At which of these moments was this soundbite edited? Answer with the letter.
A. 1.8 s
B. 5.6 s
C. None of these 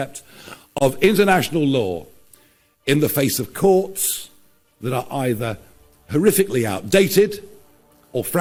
C